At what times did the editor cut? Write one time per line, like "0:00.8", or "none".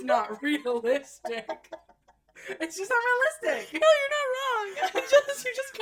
none